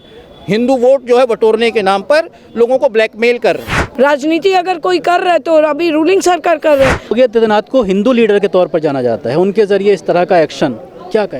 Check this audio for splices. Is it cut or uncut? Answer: cut